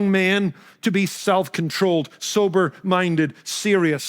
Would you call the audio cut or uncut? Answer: cut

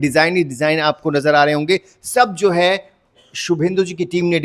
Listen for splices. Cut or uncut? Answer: uncut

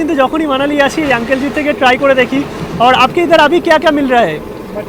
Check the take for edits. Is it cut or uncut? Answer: uncut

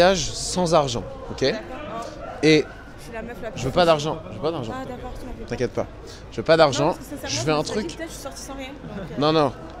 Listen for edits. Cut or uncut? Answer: uncut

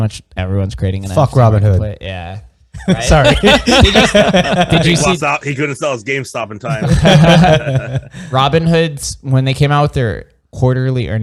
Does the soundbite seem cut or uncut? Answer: uncut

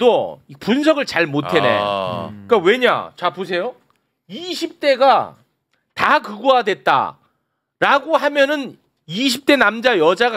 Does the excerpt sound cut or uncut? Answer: uncut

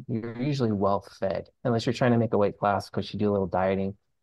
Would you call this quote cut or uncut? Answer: uncut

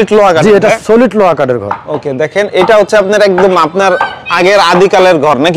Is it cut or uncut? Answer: uncut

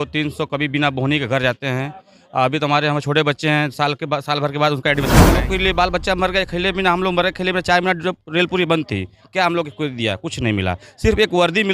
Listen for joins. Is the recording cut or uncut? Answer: cut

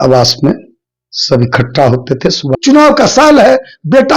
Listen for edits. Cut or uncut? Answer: cut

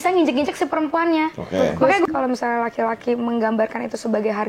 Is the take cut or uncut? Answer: cut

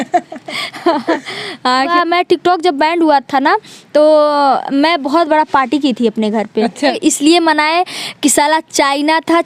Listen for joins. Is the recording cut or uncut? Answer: cut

